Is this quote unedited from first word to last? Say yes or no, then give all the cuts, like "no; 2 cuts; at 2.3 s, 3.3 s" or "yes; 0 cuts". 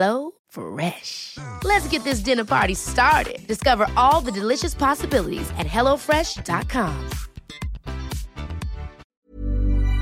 no; 1 cut; at 9.1 s